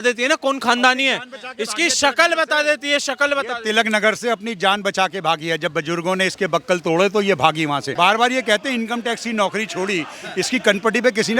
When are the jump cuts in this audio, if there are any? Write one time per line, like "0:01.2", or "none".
0:07.9